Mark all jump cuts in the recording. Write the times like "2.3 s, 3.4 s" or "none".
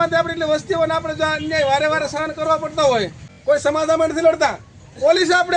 3.3 s